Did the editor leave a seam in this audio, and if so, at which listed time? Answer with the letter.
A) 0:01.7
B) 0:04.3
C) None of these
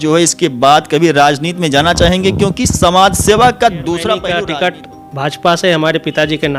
B